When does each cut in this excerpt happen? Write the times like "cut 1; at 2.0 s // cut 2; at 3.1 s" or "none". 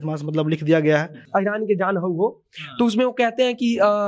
cut 1; at 1.2 s